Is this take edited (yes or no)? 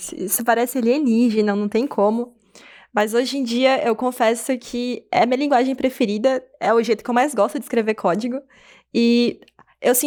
no